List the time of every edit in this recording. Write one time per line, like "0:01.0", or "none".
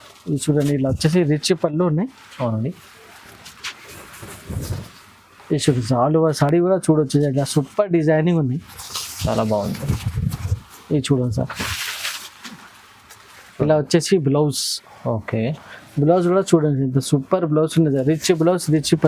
none